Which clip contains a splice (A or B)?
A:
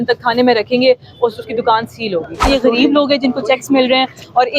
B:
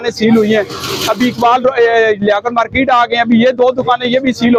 A